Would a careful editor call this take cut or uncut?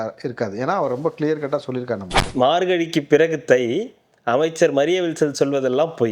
cut